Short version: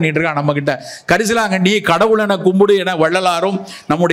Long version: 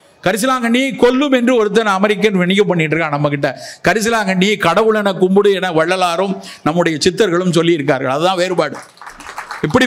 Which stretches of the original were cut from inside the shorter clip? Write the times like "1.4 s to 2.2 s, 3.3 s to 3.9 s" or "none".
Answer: none